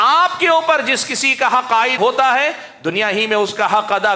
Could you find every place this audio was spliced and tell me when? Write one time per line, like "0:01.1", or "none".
0:02.0